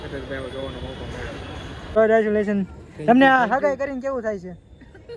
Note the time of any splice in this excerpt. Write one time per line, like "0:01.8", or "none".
0:02.0